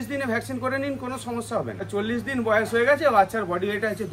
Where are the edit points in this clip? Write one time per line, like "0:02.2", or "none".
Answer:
0:01.9